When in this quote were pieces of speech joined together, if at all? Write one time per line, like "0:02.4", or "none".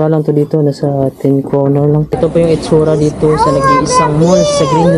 0:02.1